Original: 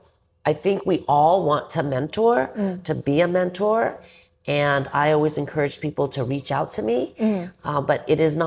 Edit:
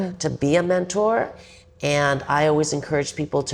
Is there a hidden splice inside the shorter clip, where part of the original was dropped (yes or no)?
no